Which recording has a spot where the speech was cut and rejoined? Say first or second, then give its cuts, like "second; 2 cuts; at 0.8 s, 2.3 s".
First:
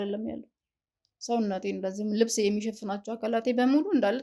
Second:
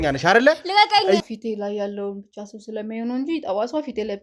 second; 1 cut; at 1.2 s